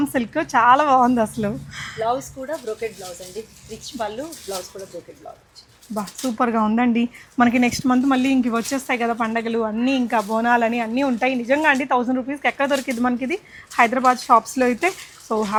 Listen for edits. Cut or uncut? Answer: uncut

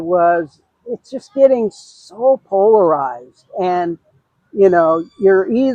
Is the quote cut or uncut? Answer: uncut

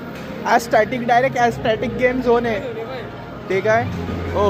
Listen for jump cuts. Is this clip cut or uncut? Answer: uncut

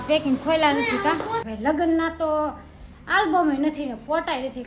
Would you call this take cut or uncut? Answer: cut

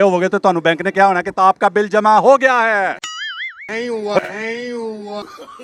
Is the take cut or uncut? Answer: uncut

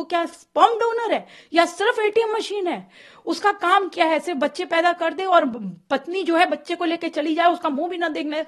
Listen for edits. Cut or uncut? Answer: uncut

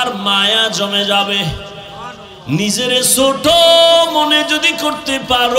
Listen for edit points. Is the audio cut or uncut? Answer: uncut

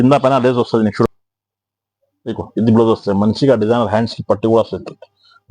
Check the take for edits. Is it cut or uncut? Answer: cut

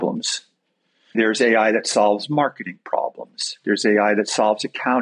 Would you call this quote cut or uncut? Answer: cut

